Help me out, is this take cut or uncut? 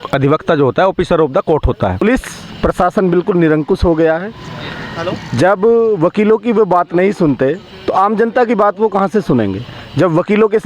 cut